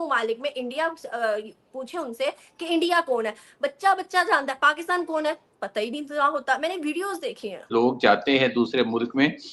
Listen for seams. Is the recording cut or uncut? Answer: cut